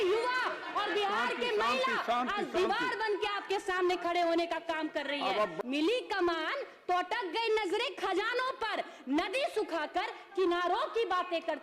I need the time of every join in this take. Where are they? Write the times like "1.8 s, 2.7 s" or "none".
5.5 s